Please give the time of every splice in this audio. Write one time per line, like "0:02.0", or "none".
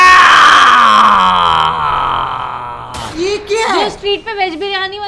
none